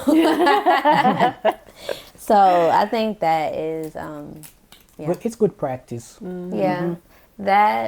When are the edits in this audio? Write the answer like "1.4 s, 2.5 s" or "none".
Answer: none